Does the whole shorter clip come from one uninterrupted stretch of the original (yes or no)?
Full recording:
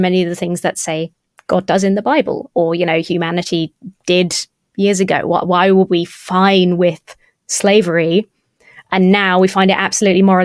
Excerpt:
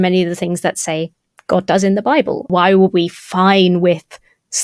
no